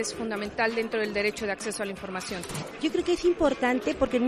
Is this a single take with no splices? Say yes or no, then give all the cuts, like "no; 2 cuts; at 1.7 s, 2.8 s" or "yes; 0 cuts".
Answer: no; 1 cut; at 2.7 s